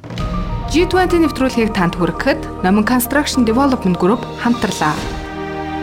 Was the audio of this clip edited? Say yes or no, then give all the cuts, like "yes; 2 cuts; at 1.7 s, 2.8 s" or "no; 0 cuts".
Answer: no; 0 cuts